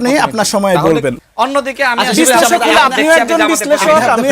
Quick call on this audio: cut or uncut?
cut